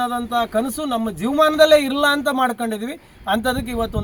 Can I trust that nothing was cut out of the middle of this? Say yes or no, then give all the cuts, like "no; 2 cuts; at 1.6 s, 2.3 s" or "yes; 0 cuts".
yes; 0 cuts